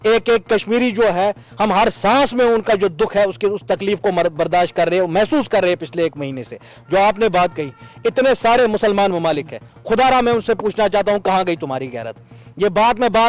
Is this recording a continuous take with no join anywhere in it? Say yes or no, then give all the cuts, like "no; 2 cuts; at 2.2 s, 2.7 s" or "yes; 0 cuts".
yes; 0 cuts